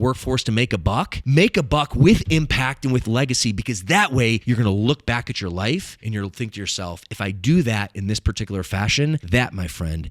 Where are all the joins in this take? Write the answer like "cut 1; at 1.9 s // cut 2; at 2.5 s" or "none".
cut 1; at 1.2 s // cut 2; at 4.4 s // cut 3; at 6.0 s // cut 4; at 9.2 s